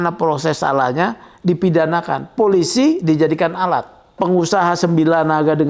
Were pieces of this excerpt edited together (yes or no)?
yes